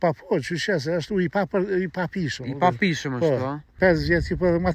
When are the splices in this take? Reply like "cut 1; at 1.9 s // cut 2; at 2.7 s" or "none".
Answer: cut 1; at 3.7 s

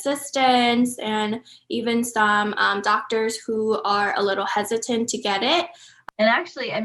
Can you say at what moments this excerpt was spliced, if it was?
cut 1; at 5.9 s

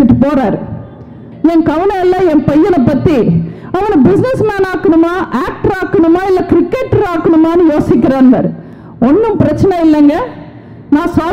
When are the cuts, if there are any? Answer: cut 1; at 1.2 s

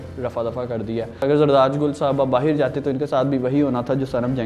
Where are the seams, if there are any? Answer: cut 1; at 1.2 s

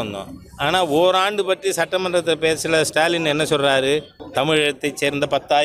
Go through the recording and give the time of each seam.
cut 1; at 4.2 s

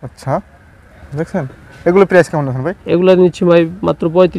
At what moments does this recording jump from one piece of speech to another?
none

